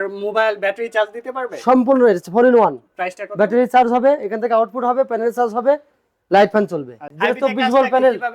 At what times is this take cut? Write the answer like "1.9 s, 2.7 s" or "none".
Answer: 7.1 s